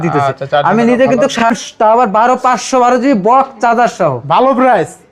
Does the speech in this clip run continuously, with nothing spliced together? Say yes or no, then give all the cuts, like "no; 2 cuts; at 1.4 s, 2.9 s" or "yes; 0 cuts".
no; 1 cut; at 1.4 s